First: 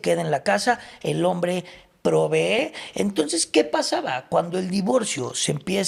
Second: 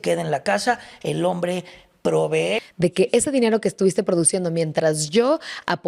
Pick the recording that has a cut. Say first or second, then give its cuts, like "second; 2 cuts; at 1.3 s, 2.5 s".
second; 1 cut; at 2.6 s